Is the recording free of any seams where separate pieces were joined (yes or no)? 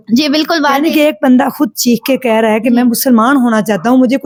yes